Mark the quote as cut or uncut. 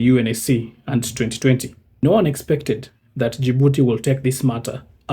cut